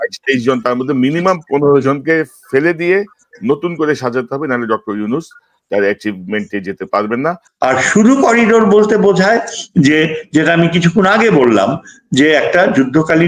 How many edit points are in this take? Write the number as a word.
one